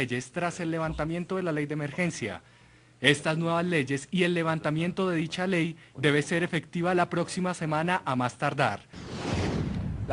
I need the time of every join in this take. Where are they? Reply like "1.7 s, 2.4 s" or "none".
4.5 s